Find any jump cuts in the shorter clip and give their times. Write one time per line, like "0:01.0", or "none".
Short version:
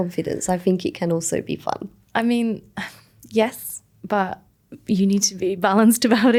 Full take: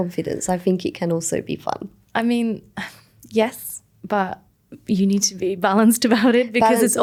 none